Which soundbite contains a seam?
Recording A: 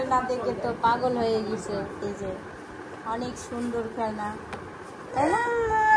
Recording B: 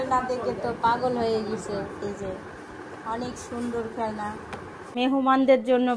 B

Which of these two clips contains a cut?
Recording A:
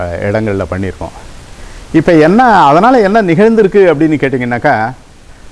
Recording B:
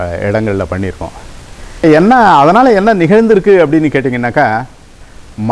B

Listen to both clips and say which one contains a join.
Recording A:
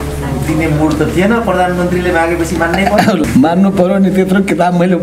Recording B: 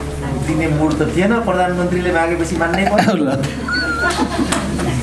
A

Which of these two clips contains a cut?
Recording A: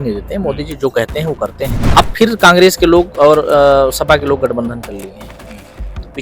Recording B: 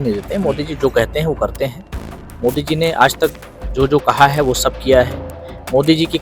A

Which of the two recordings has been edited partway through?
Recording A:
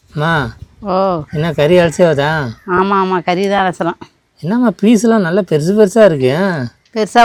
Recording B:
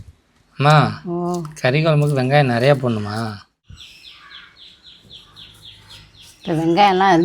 B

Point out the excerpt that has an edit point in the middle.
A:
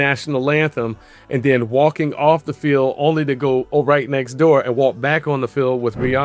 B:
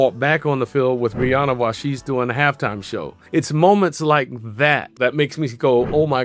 B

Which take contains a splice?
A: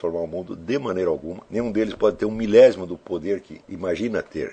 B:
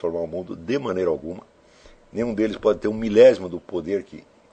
A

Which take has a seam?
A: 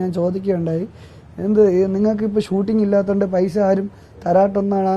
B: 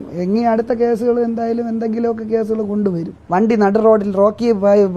B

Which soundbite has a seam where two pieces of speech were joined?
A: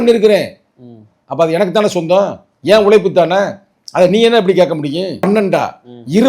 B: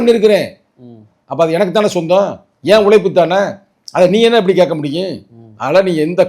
A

